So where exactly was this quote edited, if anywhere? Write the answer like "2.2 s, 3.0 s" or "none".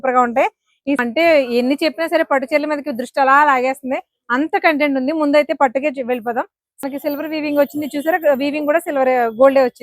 1.0 s, 6.8 s